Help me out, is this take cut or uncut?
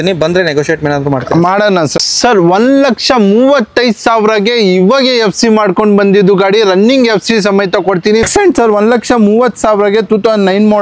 cut